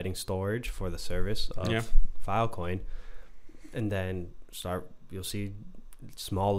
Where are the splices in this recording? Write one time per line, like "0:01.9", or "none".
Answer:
none